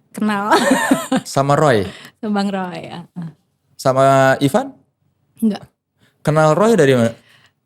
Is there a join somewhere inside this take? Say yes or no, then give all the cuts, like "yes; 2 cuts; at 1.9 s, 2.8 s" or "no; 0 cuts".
no; 0 cuts